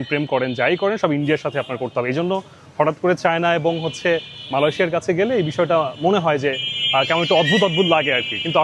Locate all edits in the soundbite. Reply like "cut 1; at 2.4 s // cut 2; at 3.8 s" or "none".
none